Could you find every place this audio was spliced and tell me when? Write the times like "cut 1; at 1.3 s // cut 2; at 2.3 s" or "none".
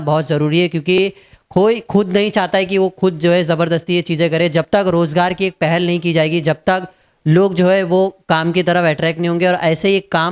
none